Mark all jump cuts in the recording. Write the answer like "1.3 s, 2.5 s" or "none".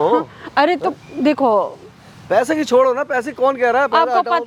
none